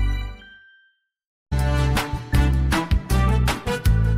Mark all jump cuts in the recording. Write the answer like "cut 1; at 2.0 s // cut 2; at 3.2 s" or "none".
cut 1; at 1.5 s

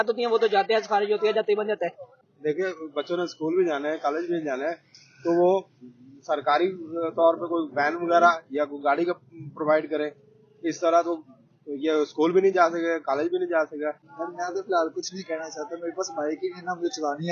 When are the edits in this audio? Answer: cut 1; at 2.3 s // cut 2; at 14.1 s

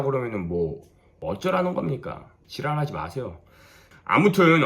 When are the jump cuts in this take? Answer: cut 1; at 3.8 s

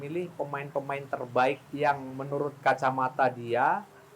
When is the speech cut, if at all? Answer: cut 1; at 1.7 s

